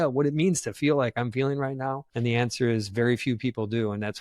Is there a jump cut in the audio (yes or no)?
yes